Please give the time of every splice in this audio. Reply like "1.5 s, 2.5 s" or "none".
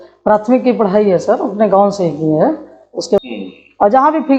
3.2 s